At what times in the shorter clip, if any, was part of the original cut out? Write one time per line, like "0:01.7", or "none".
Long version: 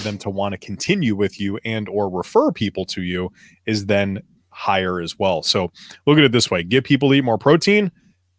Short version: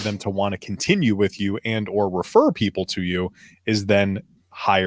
none